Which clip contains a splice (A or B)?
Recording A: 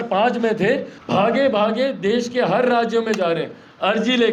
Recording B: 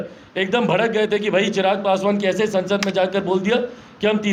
A